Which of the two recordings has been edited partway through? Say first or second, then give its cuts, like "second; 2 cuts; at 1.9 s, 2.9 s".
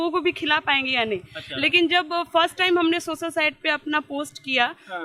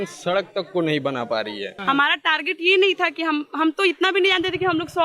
second; 1 cut; at 1.7 s